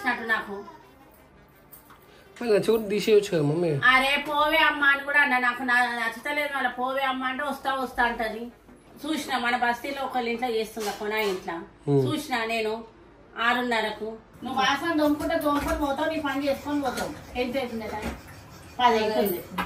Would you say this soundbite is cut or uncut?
cut